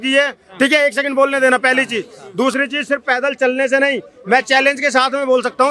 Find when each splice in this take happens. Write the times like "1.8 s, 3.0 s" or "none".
none